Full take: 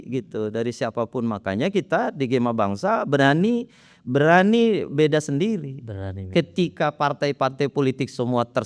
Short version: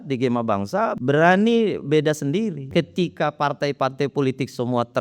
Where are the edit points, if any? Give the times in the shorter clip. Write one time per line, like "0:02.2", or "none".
0:00.9
0:02.6